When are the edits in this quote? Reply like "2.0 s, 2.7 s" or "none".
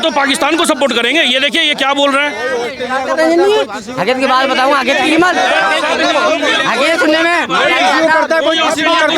none